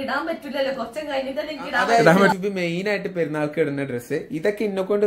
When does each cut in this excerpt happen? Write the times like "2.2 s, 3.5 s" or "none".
2.3 s

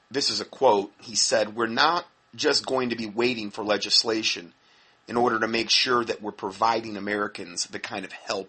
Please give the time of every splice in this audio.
1.5 s

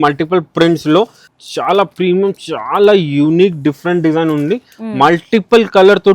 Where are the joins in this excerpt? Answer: 1.2 s

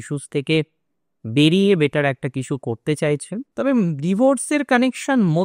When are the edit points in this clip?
3.5 s

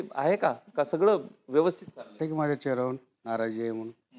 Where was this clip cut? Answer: 2.1 s

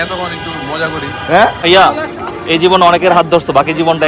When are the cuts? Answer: 1.6 s

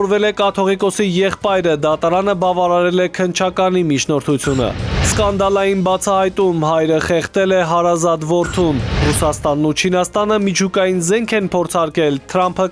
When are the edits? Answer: none

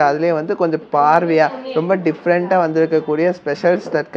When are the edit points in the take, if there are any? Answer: none

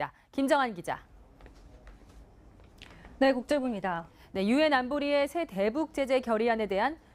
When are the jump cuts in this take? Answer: none

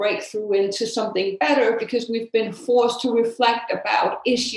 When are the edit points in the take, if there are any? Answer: none

